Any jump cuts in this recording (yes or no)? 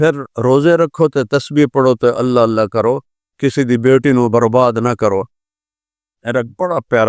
yes